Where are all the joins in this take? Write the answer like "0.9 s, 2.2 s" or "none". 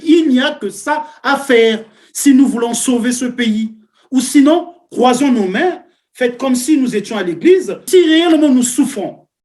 7.9 s

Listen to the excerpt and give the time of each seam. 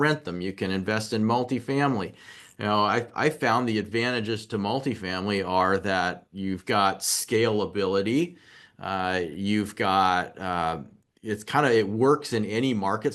none

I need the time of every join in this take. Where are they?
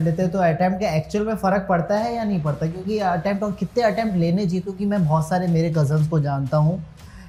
none

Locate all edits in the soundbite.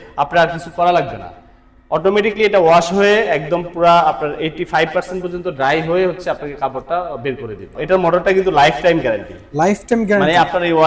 7.7 s

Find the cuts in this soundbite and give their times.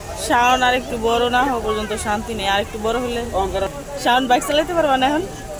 3.7 s

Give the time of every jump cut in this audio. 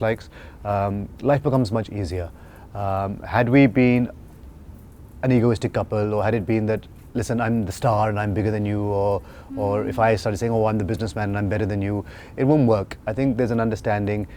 none

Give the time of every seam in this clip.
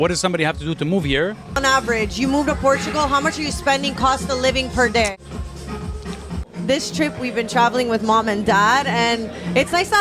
1.6 s, 5.1 s, 6.4 s

